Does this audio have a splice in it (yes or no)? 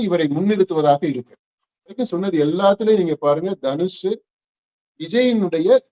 yes